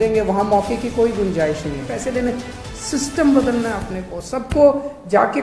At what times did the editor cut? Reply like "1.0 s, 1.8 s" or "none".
2.0 s